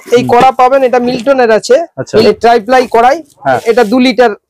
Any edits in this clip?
yes; 2 cuts; at 2.2 s, 3.6 s

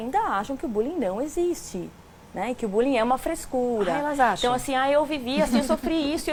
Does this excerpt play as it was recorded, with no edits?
yes; 0 cuts

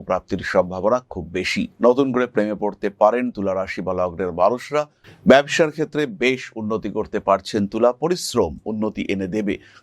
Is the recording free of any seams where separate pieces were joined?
no; 2 cuts; at 1.7 s, 5.0 s

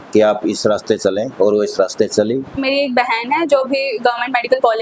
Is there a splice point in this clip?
yes; 1 cut; at 2.6 s

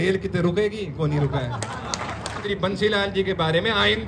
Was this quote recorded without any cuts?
no; 1 cut; at 2.4 s

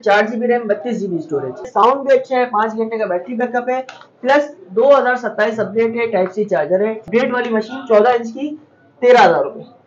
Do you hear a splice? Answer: yes; 2 cuts; at 1.7 s, 7.1 s

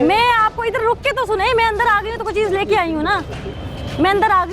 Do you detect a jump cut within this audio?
no; 0 cuts

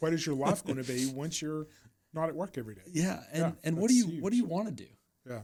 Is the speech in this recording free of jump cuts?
yes; 0 cuts

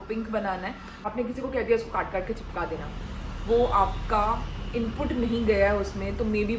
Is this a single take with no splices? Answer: no; 1 cut; at 1.0 s

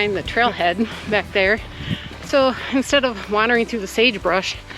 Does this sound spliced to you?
no; 0 cuts

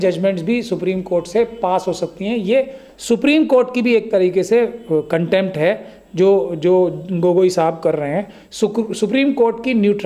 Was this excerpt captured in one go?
yes; 0 cuts

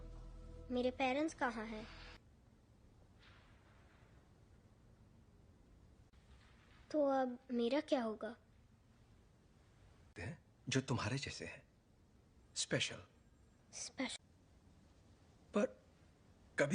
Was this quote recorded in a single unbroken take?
no; 1 cut; at 2.2 s

